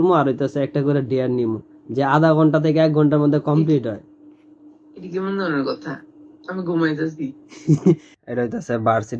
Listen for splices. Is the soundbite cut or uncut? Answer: cut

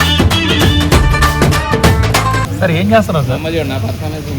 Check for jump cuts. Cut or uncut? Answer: cut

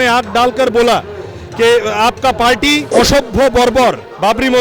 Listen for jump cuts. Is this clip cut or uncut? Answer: cut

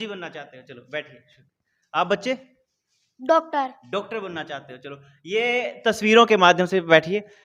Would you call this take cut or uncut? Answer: uncut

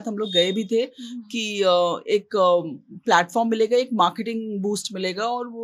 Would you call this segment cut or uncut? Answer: uncut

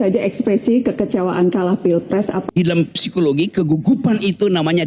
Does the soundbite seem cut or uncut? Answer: cut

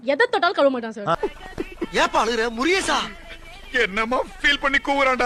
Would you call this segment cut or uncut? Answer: uncut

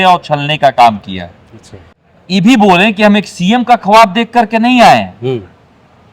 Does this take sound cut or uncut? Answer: cut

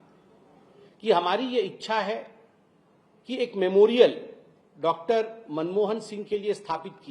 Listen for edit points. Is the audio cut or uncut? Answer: uncut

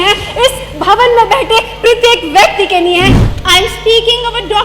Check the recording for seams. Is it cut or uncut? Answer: cut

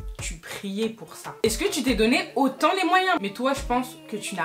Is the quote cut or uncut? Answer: cut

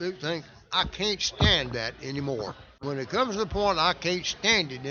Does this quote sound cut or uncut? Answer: cut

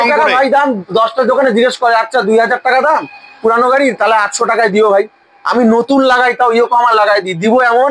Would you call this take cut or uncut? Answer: uncut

